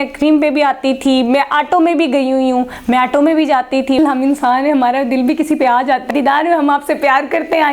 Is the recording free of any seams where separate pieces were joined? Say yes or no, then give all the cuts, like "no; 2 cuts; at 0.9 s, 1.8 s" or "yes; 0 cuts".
no; 2 cuts; at 4.0 s, 6.1 s